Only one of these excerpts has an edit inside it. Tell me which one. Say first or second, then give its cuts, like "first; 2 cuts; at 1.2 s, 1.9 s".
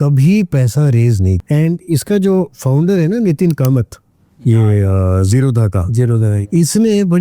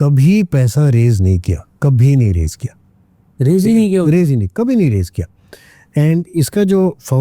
first; 1 cut; at 1.4 s